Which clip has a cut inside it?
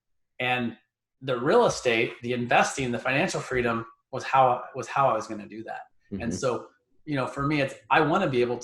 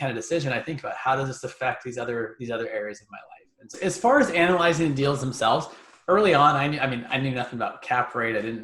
second; 1 cut; at 3.7 s

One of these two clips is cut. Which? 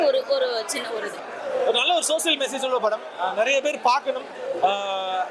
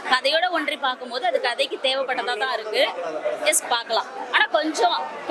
first; 1 cut; at 1.2 s

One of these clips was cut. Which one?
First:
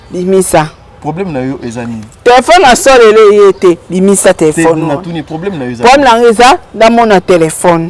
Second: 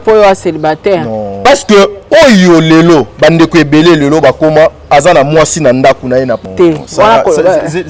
second; 3 cuts; at 1.3 s, 2.0 s, 6.4 s

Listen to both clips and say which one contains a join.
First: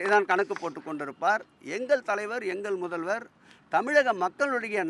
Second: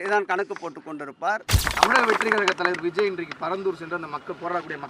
second; 1 cut; at 1.7 s

